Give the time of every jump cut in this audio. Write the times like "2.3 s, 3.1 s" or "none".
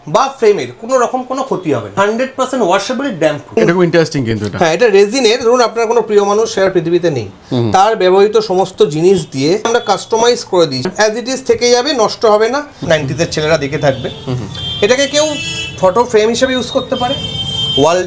2.0 s, 3.6 s, 9.7 s, 10.8 s, 12.8 s

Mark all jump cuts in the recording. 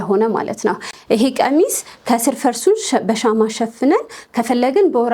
none

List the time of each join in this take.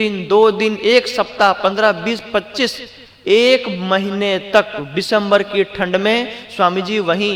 none

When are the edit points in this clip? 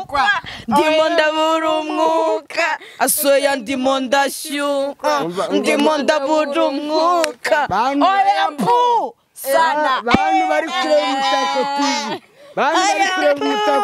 none

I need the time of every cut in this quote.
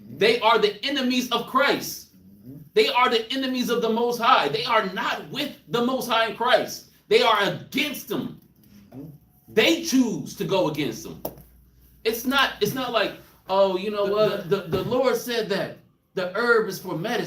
14.4 s

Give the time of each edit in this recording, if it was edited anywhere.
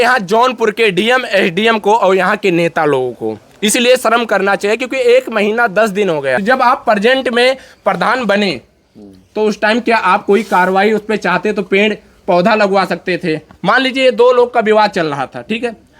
6.4 s

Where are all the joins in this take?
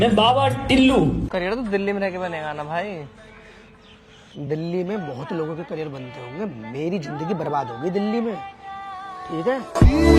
1.2 s

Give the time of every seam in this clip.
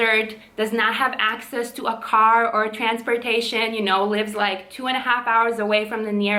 none

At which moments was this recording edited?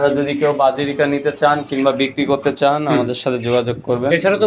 none

